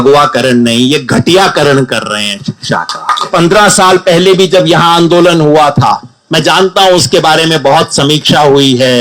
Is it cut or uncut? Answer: cut